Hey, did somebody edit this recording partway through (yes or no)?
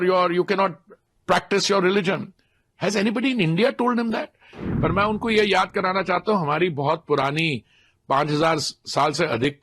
yes